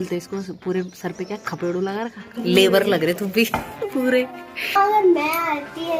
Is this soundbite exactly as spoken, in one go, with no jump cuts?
no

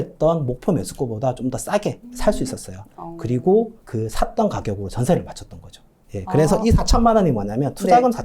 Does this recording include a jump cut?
yes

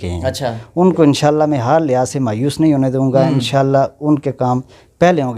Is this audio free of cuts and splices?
yes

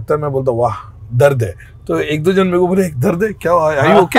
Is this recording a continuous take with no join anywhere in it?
yes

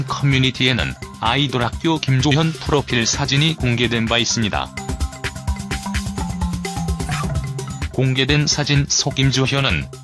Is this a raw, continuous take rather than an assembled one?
no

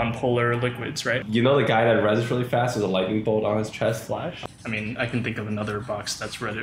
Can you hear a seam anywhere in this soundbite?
yes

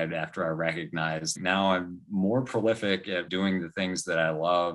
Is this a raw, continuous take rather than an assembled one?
no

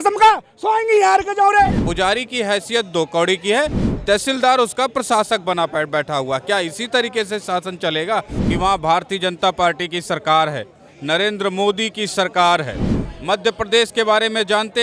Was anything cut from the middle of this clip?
yes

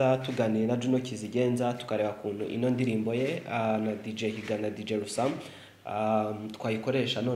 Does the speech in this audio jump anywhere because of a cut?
no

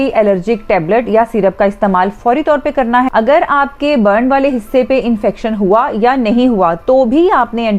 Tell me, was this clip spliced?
yes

